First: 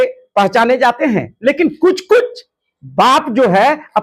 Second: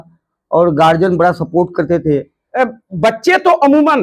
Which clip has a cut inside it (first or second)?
second